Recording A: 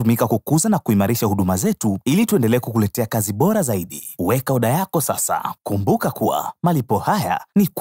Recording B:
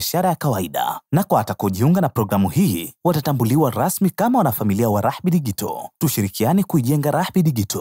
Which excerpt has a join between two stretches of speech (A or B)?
A